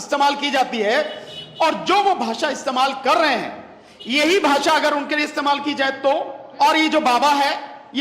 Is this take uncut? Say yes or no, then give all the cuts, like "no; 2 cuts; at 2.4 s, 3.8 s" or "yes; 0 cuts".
no; 1 cut; at 6.4 s